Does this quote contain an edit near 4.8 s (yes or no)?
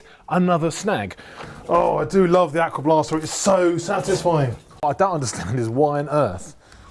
yes